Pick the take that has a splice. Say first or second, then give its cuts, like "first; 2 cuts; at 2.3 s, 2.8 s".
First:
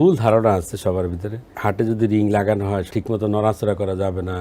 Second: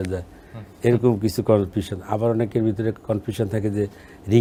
first; 2 cuts; at 1.5 s, 2.9 s